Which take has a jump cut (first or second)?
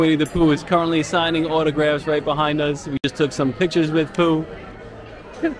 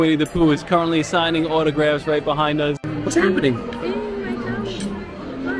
second